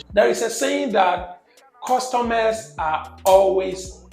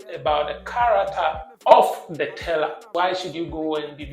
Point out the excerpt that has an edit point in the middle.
second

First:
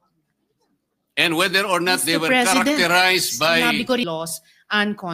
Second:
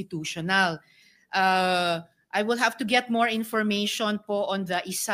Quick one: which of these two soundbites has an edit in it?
first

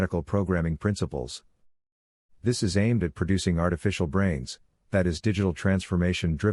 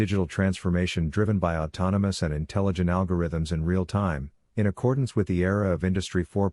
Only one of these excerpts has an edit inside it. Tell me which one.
second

